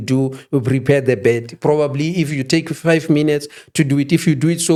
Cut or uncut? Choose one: uncut